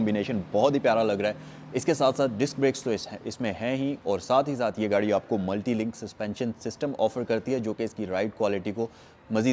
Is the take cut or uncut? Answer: uncut